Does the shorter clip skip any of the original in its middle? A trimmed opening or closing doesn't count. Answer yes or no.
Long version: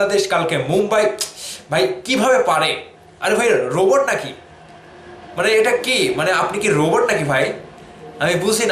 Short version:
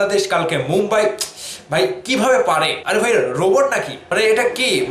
yes